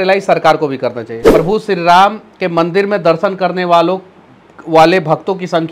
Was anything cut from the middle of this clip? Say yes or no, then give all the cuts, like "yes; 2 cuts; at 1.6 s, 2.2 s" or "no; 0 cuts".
yes; 1 cut; at 1.1 s